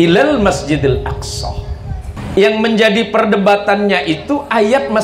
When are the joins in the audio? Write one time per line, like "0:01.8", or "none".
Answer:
0:02.1